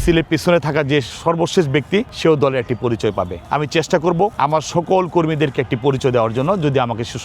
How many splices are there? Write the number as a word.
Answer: three